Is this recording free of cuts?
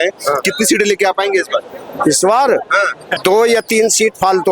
no; 1 cut; at 3.1 s

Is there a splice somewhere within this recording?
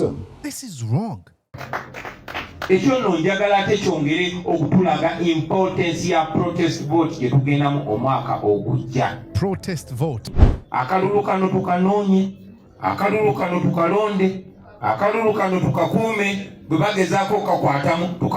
yes; 2 cuts; at 1.5 s, 10.3 s

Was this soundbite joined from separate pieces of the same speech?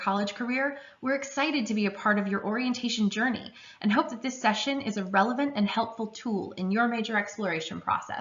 no; 0 cuts

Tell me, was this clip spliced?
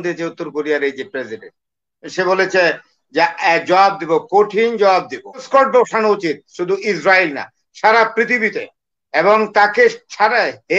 yes; 1 cut; at 5.4 s

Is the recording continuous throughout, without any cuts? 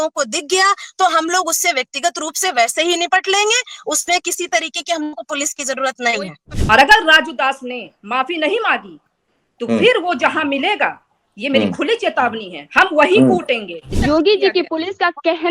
no; 2 cuts; at 6.5 s, 13.9 s

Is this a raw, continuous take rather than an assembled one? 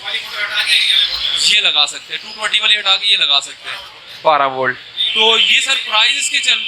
yes; 0 cuts

